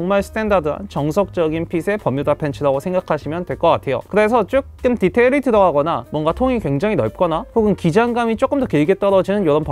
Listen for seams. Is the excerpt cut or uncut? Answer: uncut